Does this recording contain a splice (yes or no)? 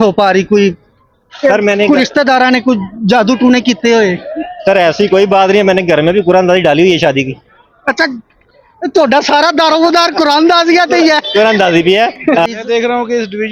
yes